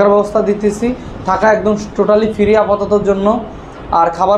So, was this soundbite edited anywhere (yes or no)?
no